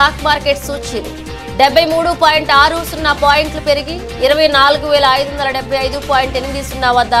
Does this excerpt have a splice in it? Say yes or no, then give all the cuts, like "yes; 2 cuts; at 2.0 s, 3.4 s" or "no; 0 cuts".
no; 0 cuts